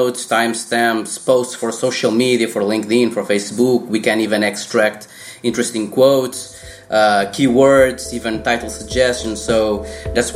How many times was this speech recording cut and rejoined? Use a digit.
0